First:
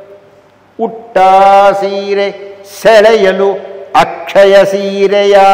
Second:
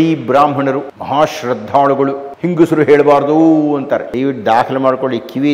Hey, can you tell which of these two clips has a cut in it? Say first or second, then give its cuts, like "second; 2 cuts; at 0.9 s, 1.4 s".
second; 3 cuts; at 0.9 s, 2.3 s, 4.1 s